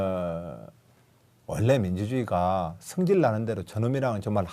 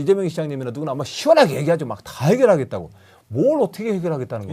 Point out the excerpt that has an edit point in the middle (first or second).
first